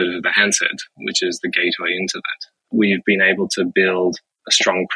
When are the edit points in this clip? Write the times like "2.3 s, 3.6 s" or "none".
2.7 s